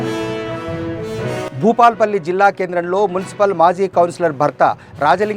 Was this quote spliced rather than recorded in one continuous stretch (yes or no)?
no